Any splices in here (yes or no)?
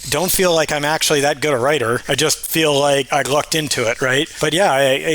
yes